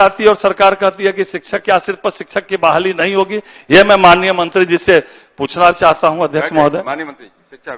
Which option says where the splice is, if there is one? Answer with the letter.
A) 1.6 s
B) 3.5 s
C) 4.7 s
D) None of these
D